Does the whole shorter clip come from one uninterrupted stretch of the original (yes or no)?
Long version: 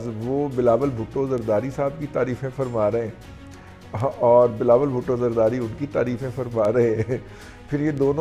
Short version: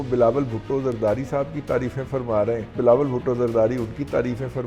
no